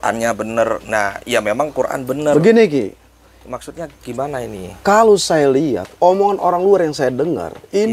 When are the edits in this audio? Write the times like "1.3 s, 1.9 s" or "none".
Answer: none